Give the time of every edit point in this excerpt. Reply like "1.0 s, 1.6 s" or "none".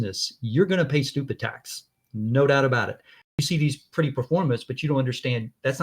3.3 s